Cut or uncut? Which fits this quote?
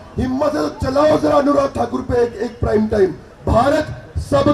cut